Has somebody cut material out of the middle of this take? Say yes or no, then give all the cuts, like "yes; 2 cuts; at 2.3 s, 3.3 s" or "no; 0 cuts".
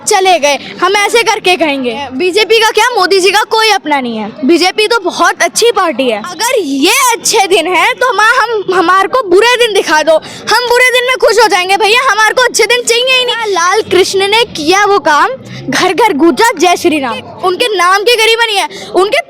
yes; 4 cuts; at 2.1 s, 6.3 s, 13.4 s, 17.3 s